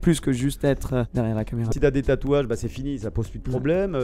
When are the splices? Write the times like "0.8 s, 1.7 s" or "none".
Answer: 1.7 s